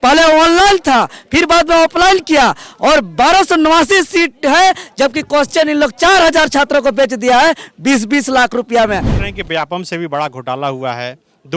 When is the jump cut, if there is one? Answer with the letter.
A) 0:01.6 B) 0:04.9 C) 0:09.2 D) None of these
C